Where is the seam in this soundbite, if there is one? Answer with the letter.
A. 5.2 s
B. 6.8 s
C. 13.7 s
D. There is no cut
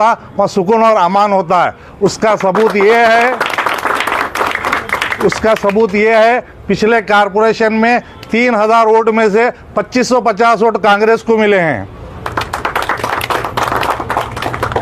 D